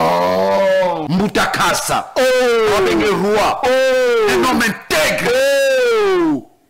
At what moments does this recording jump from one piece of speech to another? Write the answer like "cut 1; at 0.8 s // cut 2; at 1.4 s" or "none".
cut 1; at 1.0 s